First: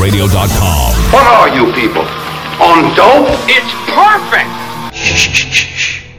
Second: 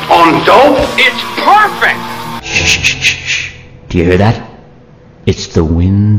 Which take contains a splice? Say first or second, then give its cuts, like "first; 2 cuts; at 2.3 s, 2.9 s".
first; 1 cut; at 1.0 s